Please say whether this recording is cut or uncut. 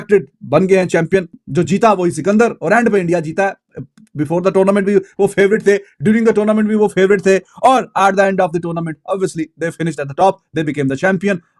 uncut